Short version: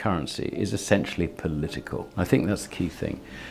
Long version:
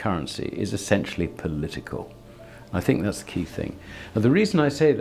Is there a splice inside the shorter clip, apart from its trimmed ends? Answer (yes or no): yes